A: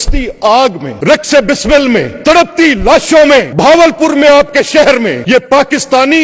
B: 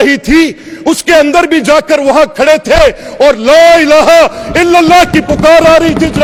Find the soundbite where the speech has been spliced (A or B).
A